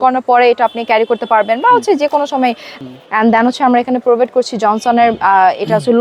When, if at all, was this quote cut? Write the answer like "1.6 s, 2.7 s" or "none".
2.8 s